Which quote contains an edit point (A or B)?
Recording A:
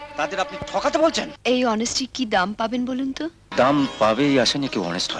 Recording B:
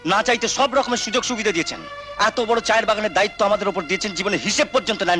A